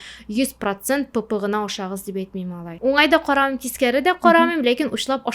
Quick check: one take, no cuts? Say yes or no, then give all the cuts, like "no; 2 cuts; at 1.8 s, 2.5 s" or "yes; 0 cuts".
no; 1 cut; at 2.8 s